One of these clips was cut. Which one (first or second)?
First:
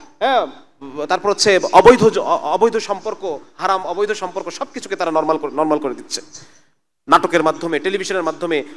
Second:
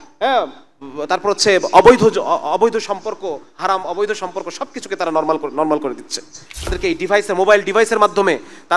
second